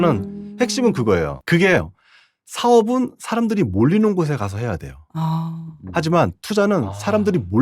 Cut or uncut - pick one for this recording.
cut